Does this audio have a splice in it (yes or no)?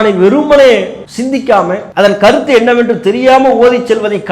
yes